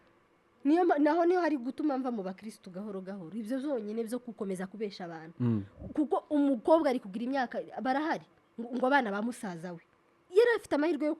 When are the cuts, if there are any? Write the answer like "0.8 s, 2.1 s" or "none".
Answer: none